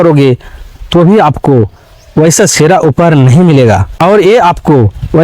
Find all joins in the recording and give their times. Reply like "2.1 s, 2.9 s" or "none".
3.9 s